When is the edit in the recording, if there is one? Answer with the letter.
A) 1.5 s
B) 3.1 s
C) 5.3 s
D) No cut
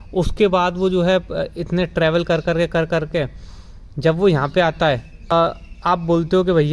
C